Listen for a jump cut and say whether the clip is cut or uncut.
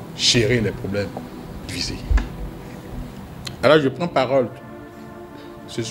cut